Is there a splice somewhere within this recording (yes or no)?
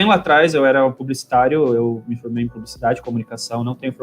no